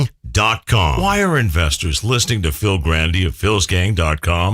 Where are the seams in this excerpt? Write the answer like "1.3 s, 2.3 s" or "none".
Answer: 1.0 s